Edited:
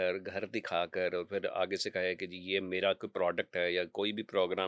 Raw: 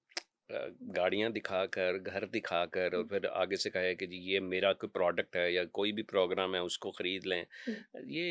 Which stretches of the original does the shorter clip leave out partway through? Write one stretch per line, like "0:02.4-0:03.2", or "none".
none